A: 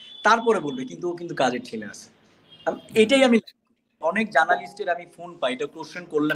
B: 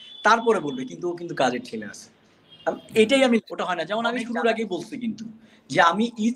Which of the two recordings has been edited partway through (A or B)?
B